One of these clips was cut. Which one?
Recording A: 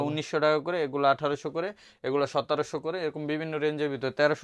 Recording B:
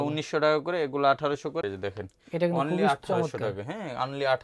B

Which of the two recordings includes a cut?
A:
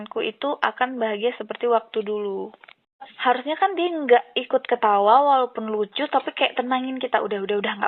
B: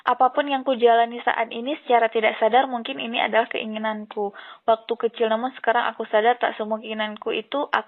A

